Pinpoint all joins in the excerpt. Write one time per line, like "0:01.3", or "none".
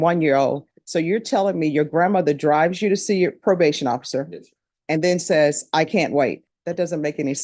0:06.5